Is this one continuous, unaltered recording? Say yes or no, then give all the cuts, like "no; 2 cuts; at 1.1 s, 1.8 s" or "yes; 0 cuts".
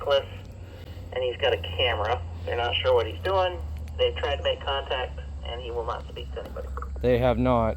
yes; 0 cuts